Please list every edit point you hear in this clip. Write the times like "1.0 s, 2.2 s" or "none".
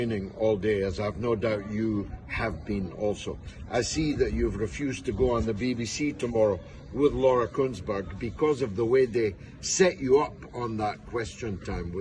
none